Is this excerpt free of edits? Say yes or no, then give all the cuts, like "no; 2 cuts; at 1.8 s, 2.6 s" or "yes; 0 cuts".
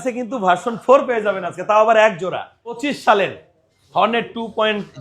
no; 1 cut; at 2.9 s